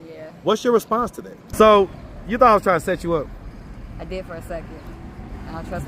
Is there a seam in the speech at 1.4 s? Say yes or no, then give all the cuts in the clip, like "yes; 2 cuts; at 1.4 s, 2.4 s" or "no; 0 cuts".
yes; 1 cut; at 1.4 s